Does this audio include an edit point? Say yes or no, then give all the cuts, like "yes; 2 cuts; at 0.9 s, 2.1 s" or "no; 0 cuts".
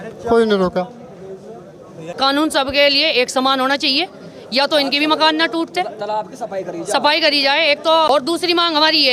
yes; 2 cuts; at 2.1 s, 8.1 s